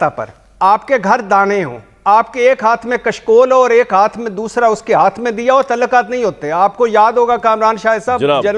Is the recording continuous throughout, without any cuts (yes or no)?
yes